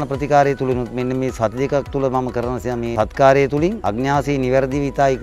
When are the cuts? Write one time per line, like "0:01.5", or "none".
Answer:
0:02.9
0:03.8